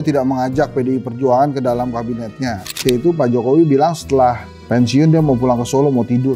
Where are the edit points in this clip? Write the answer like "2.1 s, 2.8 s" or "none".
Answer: 2.8 s